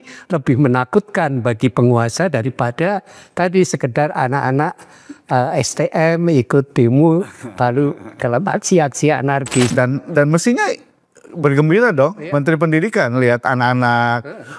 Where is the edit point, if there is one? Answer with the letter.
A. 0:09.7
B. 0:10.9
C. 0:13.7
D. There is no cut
A